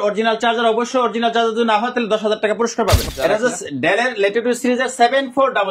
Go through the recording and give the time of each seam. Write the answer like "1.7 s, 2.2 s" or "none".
3.0 s